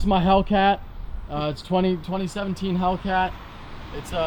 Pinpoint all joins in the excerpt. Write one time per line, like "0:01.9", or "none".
none